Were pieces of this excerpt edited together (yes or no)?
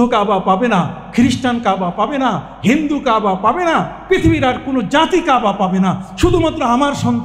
no